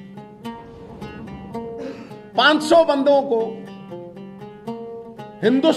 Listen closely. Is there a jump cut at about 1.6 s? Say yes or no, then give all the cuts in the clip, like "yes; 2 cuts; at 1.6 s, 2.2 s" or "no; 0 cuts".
yes; 1 cut; at 1.6 s